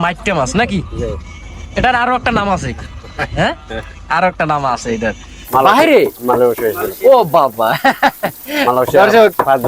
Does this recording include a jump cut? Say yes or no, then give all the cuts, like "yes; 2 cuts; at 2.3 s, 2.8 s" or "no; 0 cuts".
yes; 1 cut; at 5.4 s